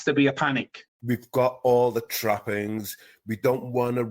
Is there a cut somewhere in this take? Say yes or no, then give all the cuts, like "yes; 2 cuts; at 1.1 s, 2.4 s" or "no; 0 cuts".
yes; 1 cut; at 1.0 s